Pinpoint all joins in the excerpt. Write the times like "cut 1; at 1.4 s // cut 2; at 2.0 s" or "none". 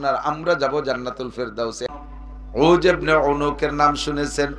cut 1; at 1.9 s